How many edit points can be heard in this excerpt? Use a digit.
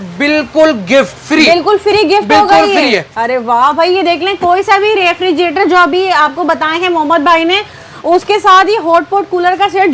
0